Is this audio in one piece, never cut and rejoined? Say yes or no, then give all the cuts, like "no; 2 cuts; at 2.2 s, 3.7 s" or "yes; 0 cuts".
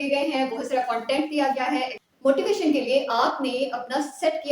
no; 1 cut; at 2.0 s